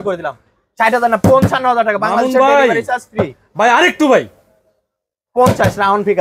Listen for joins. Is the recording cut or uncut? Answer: uncut